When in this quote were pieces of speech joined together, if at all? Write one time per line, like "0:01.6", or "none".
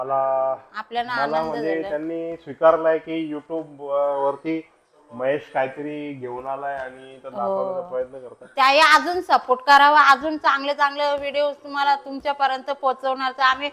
none